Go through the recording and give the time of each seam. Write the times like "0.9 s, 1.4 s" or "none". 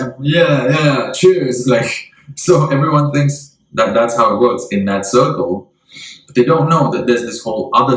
none